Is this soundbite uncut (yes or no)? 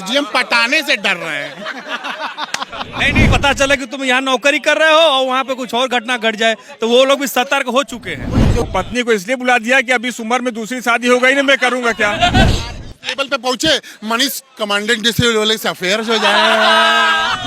no